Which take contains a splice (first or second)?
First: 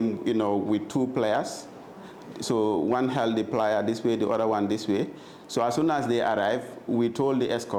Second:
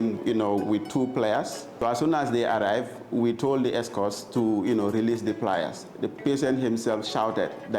second